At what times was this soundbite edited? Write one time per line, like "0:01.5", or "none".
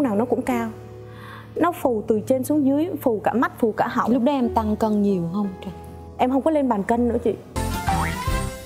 0:07.5